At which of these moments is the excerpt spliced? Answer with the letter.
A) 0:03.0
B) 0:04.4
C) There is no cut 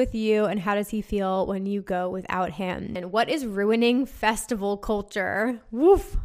A